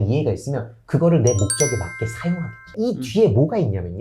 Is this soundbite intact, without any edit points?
no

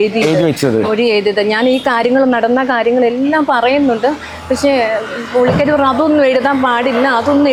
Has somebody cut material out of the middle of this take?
no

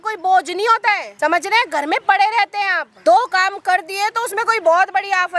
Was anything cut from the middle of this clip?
yes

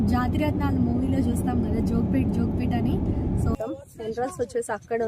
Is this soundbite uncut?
no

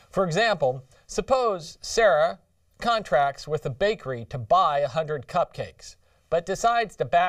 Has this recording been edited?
no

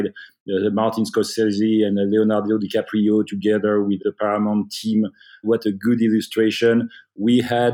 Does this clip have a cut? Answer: no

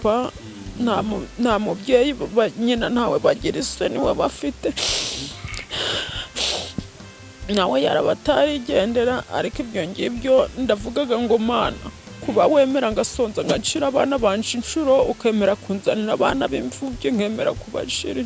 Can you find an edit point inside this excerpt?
no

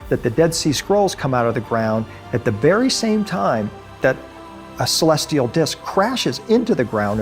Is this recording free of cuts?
yes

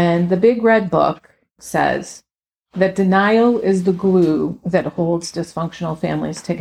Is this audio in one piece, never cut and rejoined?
no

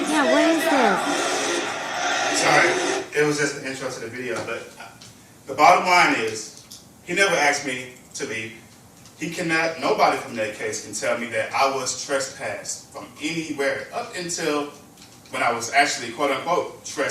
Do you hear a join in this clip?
no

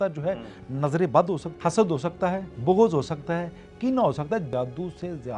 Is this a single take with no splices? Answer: no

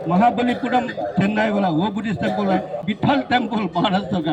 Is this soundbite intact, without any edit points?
no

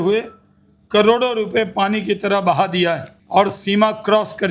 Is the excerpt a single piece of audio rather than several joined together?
no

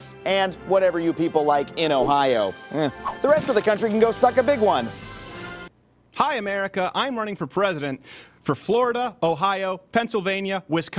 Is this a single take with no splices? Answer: no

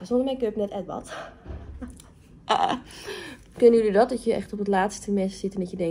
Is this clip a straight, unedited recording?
yes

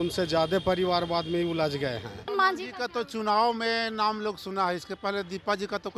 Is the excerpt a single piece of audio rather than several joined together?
no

